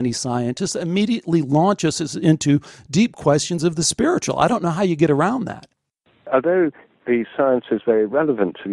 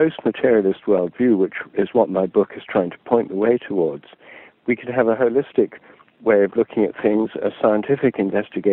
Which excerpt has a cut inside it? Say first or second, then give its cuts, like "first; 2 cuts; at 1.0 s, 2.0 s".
first; 1 cut; at 5.8 s